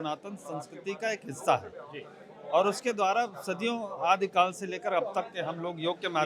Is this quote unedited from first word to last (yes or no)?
yes